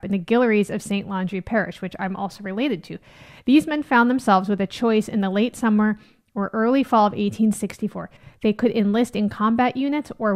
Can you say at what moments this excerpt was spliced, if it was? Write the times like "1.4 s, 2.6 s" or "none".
none